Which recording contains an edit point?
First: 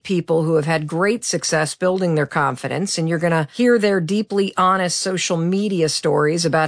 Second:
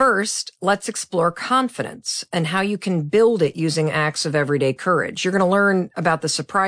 first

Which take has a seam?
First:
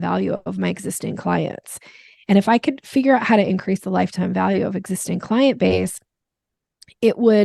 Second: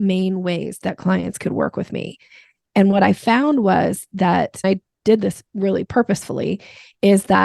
second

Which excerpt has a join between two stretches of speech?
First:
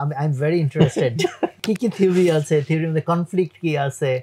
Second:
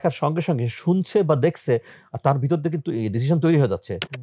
first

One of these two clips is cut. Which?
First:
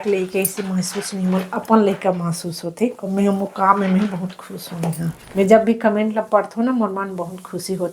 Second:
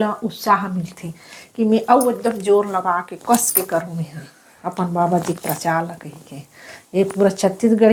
first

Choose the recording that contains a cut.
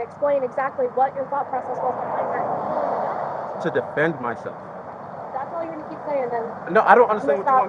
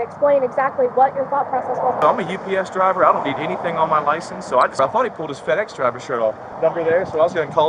second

